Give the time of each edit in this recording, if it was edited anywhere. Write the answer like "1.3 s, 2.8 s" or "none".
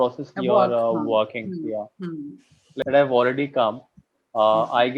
2.8 s